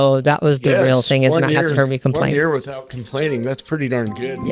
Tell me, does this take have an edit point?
no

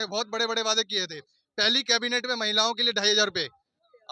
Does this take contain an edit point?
no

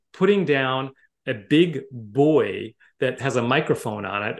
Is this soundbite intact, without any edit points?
yes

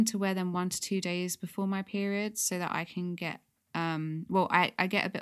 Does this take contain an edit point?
no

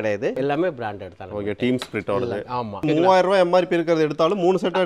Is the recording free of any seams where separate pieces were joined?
no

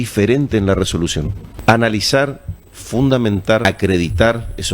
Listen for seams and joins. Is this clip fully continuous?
no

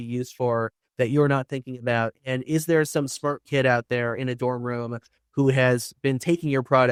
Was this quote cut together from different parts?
no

